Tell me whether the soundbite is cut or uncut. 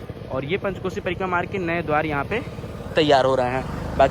uncut